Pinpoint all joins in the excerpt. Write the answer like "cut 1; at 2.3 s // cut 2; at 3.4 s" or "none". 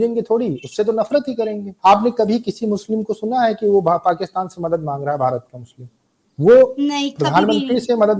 cut 1; at 1.7 s